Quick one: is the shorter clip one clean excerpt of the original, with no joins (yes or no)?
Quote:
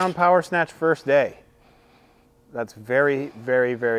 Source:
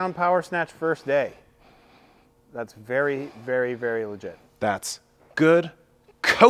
yes